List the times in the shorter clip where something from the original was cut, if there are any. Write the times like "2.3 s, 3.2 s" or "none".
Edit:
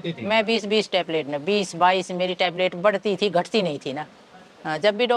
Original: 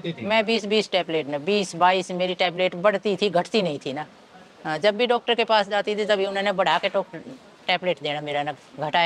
none

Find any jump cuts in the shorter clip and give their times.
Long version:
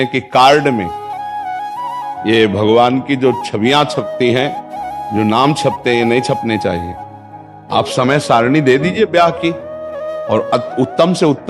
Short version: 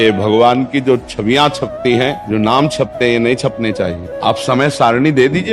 2.2 s, 4.0 s

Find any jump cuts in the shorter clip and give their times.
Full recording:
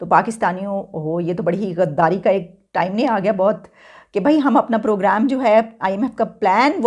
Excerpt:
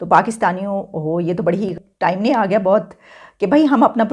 1.7 s

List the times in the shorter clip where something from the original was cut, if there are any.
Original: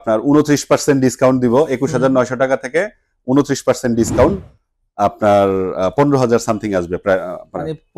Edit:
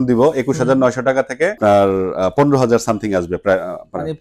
1.6 s

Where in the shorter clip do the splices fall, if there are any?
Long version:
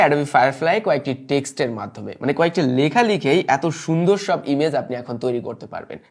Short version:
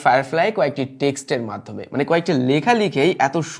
none

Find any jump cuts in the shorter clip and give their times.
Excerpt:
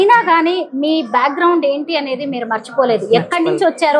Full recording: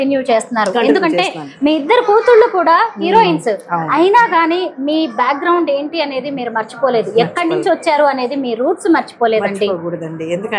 none

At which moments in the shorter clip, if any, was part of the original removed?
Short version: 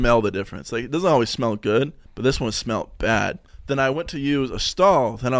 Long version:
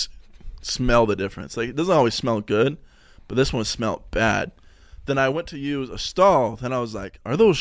2.0 s, 3.5 s

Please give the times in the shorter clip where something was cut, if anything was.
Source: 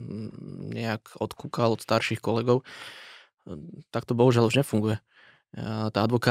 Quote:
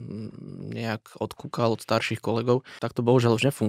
2.8 s

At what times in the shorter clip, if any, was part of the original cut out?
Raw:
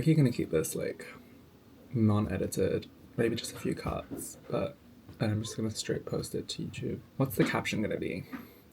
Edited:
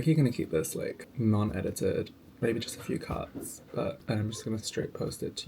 1.0 s, 4.0 s

